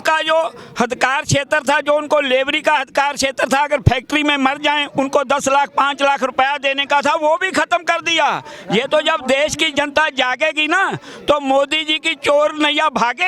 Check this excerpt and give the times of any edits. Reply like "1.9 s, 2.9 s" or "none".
none